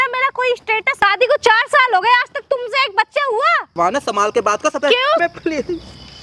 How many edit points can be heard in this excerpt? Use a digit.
2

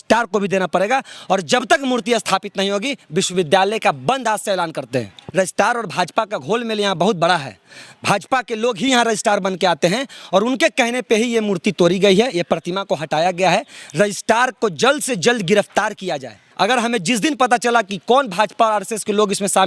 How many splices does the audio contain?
2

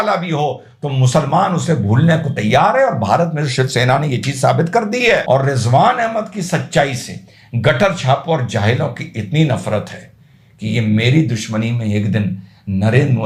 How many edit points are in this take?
0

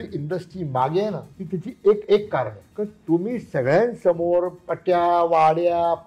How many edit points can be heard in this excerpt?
2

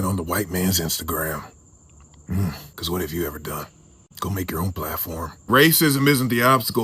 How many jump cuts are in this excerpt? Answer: 0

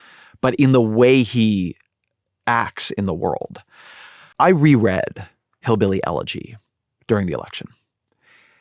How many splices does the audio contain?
1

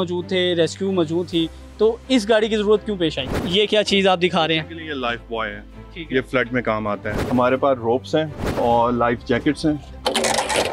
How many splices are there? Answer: 4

